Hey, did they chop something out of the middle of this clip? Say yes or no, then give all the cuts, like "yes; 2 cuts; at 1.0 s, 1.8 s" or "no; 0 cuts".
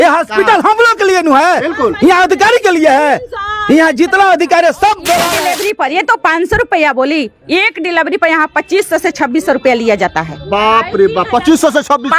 yes; 1 cut; at 5.4 s